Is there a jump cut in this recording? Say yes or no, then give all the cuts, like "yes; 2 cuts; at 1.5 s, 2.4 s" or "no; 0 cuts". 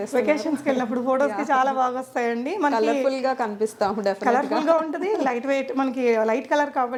no; 0 cuts